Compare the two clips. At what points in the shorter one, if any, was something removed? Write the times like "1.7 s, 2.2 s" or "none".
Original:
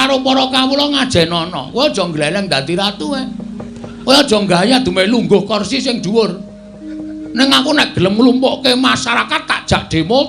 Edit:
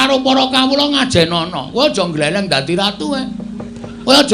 none